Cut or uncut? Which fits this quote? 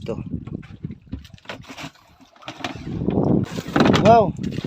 cut